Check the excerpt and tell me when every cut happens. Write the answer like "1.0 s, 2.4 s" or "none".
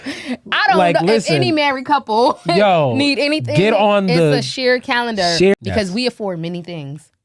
5.6 s